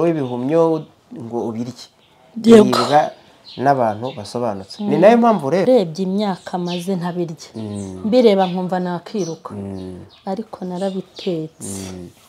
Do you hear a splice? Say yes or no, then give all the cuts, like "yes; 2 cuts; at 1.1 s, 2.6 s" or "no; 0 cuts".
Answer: yes; 1 cut; at 5.7 s